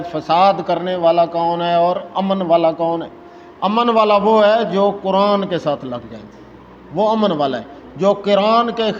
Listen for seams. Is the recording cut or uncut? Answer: uncut